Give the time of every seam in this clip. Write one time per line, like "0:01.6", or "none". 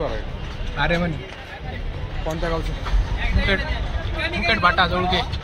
none